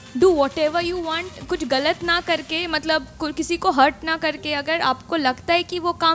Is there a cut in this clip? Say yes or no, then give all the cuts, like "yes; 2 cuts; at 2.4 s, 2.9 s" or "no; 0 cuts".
no; 0 cuts